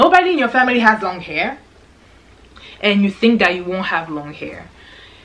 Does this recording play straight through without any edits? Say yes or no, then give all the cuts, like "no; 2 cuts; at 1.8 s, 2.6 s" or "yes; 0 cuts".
yes; 0 cuts